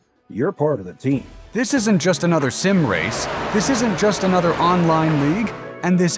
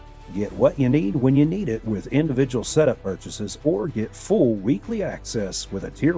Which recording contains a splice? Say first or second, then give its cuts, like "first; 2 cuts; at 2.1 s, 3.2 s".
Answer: first; 1 cut; at 1.5 s